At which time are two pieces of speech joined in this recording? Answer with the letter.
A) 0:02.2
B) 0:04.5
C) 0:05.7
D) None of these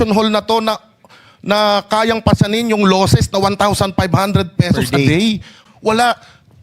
C